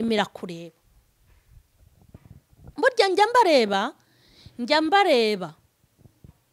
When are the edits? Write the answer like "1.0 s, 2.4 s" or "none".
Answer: 2.7 s